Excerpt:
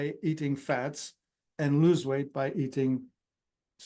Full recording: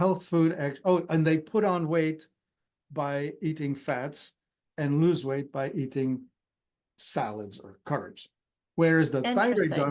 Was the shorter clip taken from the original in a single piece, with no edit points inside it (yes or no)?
yes